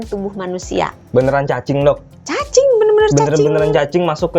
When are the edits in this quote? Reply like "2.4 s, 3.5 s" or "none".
1.0 s